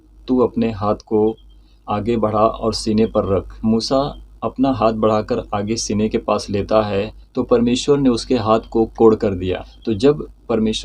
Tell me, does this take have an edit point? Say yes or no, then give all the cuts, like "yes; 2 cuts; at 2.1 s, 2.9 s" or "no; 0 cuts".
yes; 2 cuts; at 3.5 s, 9.7 s